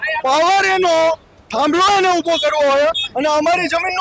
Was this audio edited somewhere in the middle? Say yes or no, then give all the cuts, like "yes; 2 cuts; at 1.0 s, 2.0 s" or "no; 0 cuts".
no; 0 cuts